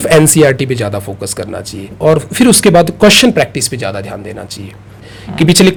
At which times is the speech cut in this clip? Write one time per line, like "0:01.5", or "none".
none